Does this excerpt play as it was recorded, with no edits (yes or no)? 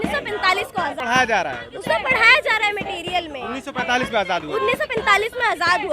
no